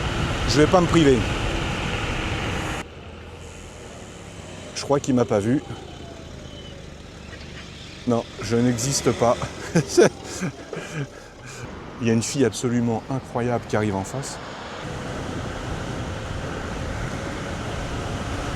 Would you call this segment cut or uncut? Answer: cut